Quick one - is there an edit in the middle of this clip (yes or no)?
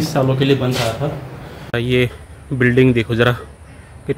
yes